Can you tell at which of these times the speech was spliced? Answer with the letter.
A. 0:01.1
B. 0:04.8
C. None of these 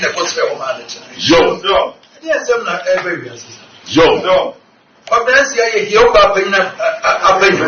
C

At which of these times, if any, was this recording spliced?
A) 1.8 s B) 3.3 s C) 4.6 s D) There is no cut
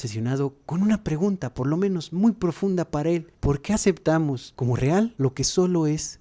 B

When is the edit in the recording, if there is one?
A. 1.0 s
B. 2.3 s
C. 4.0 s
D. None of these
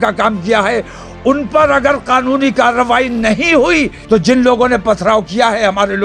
C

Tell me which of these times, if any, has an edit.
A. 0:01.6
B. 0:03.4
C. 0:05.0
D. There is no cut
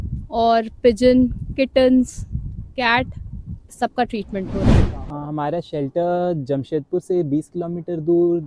D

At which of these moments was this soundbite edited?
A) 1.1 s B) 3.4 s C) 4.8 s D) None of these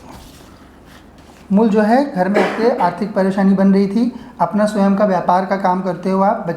A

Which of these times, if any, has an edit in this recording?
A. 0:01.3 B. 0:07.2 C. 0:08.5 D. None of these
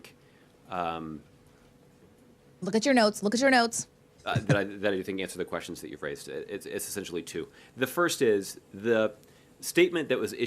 C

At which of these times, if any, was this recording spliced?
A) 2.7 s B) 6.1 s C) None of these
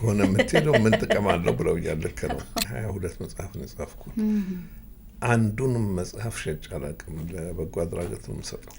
A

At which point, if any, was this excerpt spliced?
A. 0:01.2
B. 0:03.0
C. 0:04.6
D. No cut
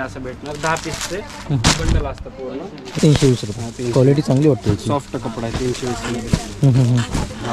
B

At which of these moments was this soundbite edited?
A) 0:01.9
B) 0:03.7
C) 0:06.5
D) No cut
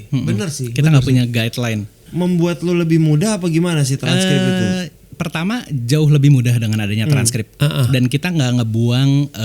A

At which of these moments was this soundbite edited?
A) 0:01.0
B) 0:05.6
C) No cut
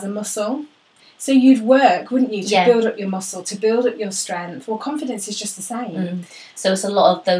A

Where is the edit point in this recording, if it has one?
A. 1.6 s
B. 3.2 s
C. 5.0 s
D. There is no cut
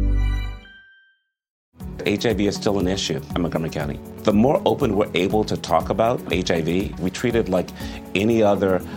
A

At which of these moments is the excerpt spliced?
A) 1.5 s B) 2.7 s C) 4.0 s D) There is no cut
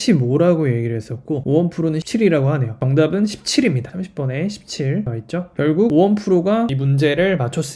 B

